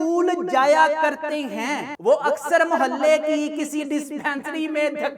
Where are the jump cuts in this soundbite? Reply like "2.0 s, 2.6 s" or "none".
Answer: 2.0 s